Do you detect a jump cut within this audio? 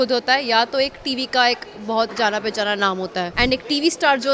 yes; 1 cut; at 3.3 s

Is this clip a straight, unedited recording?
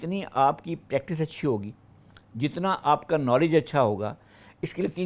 yes; 0 cuts

